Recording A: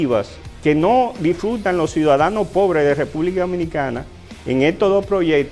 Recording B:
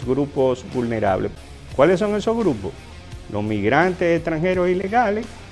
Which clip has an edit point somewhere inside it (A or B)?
B